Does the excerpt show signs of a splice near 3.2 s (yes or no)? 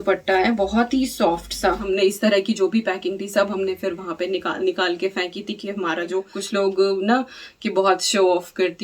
no